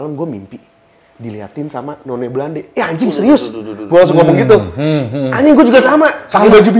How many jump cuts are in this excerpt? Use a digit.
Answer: 0